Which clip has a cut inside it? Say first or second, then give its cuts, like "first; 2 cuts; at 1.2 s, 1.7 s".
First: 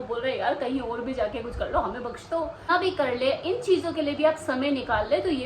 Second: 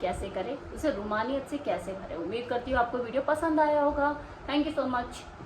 first; 1 cut; at 2.7 s